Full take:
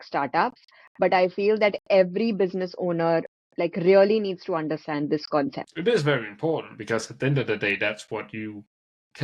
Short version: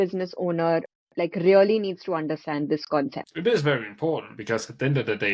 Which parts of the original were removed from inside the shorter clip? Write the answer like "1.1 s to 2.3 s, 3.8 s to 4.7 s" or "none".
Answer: none